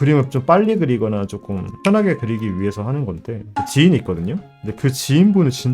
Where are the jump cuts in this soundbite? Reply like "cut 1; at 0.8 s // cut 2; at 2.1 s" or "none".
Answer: cut 1; at 3.5 s